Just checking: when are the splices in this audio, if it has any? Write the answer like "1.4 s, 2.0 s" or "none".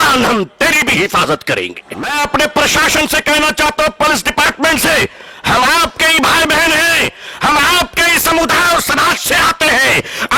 2.1 s